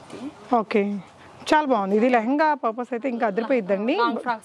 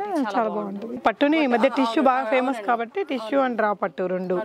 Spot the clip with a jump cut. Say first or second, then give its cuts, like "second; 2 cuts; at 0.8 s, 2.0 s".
second; 1 cut; at 1.0 s